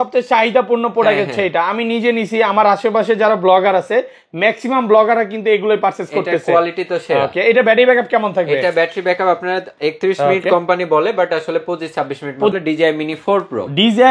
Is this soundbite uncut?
no; 1 cut; at 12.5 s

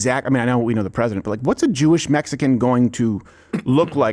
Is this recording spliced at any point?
no; 0 cuts

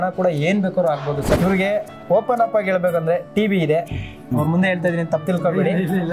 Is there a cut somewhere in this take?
yes; 2 cuts; at 1.4 s, 4.2 s

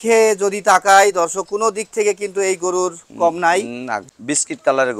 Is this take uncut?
no; 1 cut; at 4.0 s

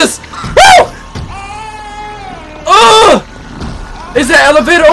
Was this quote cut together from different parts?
no; 0 cuts

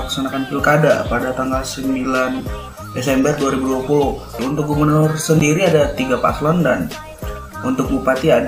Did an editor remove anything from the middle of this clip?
yes; 1 cut; at 4.4 s

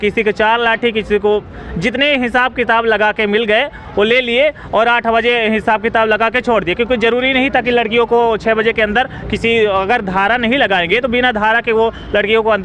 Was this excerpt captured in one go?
yes; 0 cuts

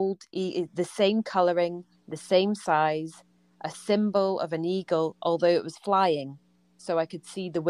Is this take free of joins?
yes; 0 cuts

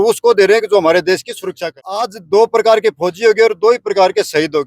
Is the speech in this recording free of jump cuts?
no; 1 cut; at 2.2 s

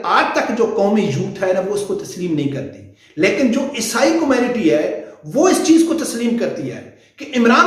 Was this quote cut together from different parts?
no; 0 cuts

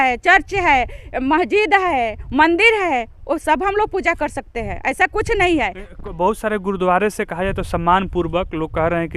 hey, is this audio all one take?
yes; 0 cuts

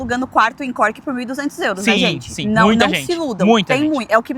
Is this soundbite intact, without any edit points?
yes; 0 cuts

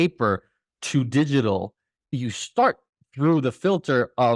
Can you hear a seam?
yes; 1 cut; at 2.0 s

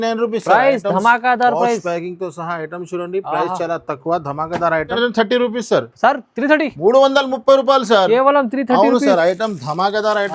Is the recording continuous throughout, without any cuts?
no; 1 cut; at 5.0 s

